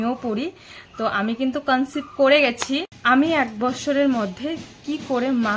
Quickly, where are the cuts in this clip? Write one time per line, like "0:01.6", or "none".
0:02.9